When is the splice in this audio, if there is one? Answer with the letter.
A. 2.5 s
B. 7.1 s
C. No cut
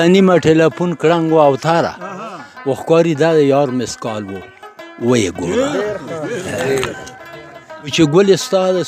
C